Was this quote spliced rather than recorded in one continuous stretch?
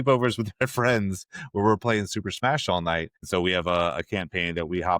yes; 1 cut; at 3.2 s

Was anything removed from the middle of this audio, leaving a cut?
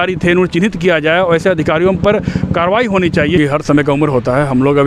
yes; 1 cut; at 3.4 s

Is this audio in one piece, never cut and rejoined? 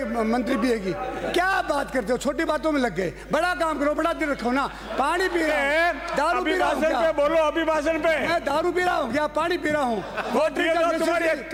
yes; 0 cuts

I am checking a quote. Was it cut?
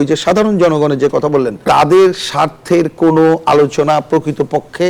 no; 0 cuts

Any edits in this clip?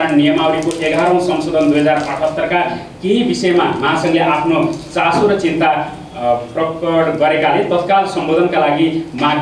no; 0 cuts

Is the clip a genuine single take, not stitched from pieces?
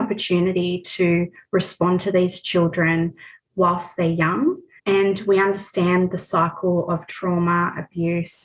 yes; 0 cuts

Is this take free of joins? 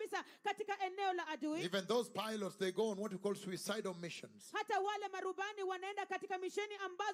yes; 0 cuts

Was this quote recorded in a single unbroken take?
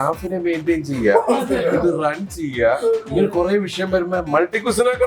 yes; 0 cuts

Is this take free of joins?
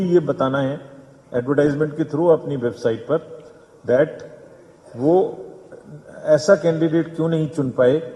yes; 0 cuts

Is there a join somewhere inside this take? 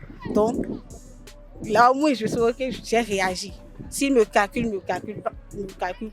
no; 0 cuts

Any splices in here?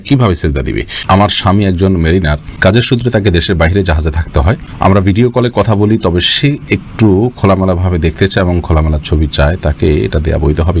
yes; 3 cuts; at 0.9 s, 2.4 s, 4.7 s

